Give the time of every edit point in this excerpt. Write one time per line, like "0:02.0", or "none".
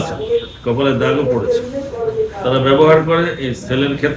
none

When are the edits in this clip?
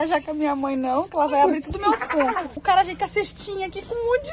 0:02.5

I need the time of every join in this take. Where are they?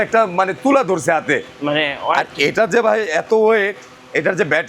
none

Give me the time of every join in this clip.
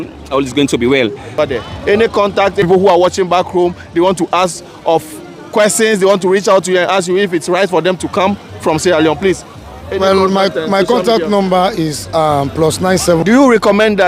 0:01.3
0:02.6
0:13.2

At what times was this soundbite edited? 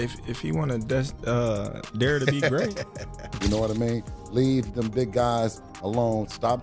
0:03.2

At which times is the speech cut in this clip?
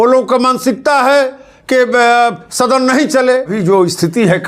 0:03.6

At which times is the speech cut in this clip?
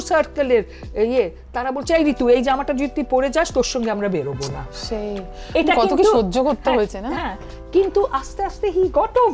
none

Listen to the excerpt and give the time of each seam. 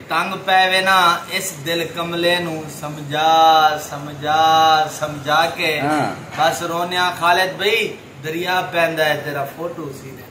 none

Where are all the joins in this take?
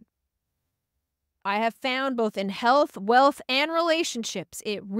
0:01.4

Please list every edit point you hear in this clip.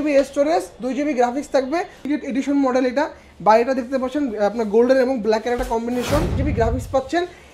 0:02.1
0:06.4

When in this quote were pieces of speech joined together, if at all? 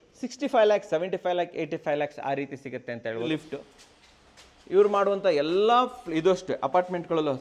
0:03.2

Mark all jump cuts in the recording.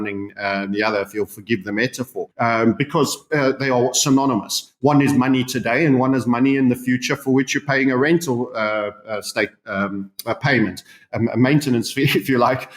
0:02.3

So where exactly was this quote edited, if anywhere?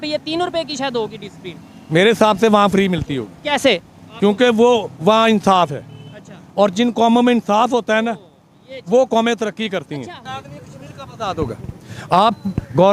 0:10.2

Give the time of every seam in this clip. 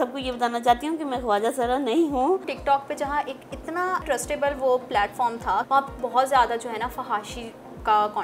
0:02.5
0:04.0
0:05.7

